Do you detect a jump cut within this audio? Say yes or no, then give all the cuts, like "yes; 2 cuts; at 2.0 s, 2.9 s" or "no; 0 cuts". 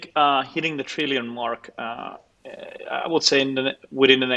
no; 0 cuts